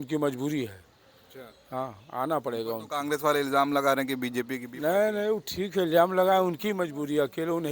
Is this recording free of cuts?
yes; 0 cuts

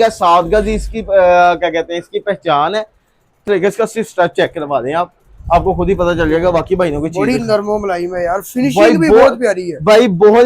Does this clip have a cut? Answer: yes; 1 cut; at 3.4 s

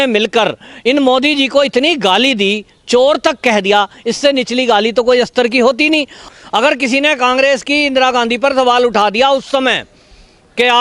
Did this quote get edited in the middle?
yes; 1 cut; at 6.3 s

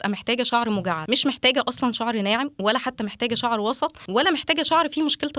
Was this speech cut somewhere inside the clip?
yes; 2 cuts; at 1.0 s, 4.0 s

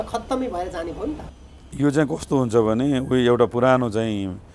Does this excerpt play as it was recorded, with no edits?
yes; 0 cuts

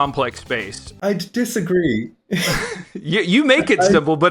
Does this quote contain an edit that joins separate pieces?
yes; 1 cut; at 1.0 s

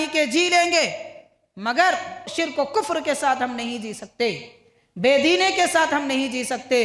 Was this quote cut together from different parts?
yes; 1 cut; at 2.3 s

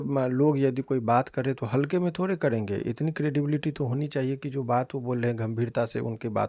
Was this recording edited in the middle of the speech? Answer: no; 0 cuts

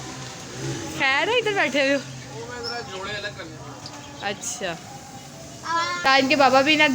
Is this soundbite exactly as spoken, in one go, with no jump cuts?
no; 1 cut; at 6.0 s

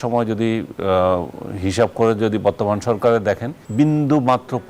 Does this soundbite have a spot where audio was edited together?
yes; 1 cut; at 3.6 s

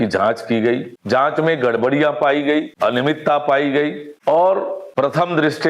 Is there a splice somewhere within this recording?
yes; 4 cuts; at 0.9 s, 2.7 s, 4.1 s, 4.8 s

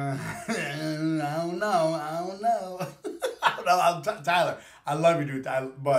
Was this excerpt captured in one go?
yes; 0 cuts

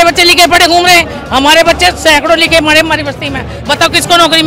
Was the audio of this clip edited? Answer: no; 0 cuts

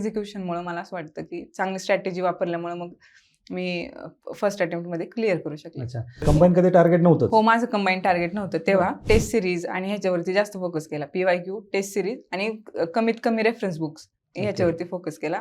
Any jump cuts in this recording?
yes; 2 cuts; at 6.2 s, 9.0 s

